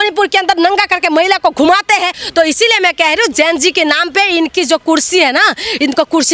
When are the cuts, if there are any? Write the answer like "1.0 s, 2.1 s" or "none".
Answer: 2.2 s